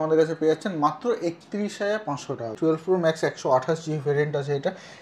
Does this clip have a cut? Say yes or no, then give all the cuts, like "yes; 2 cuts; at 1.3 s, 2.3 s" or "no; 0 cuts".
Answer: yes; 1 cut; at 2.6 s